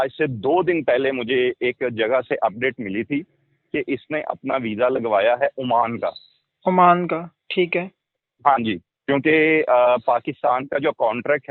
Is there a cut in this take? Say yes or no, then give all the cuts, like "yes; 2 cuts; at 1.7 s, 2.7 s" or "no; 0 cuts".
no; 0 cuts